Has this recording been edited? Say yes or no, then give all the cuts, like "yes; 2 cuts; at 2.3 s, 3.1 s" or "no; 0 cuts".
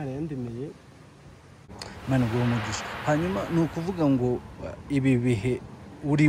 yes; 1 cut; at 1.8 s